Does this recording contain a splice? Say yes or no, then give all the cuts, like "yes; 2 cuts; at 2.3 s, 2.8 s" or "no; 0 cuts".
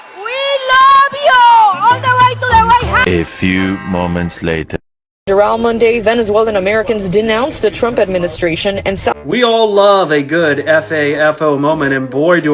yes; 1 cut; at 9.1 s